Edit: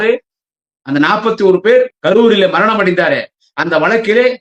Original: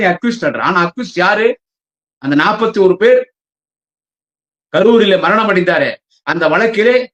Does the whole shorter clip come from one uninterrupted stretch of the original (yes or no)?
no